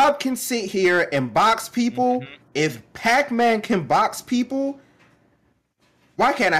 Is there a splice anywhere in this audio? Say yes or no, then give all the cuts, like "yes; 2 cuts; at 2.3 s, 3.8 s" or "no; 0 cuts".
no; 0 cuts